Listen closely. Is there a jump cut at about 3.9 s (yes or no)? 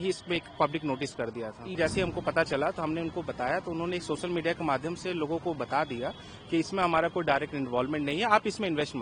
no